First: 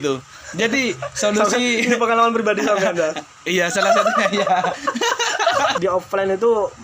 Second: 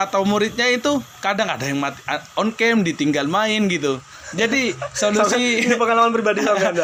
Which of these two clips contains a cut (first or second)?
first